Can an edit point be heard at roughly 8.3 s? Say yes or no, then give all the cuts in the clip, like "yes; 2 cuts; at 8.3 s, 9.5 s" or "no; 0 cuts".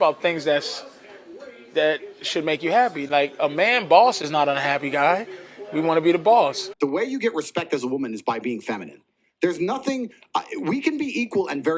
no; 1 cut; at 6.6 s